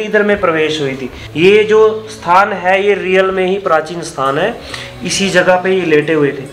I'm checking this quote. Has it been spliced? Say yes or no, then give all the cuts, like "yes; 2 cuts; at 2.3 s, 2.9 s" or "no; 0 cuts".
yes; 1 cut; at 1.2 s